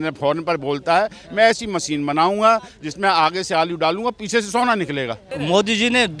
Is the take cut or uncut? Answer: cut